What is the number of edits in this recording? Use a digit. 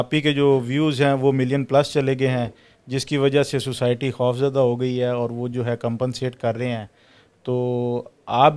0